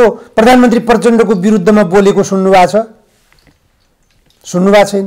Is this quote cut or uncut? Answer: uncut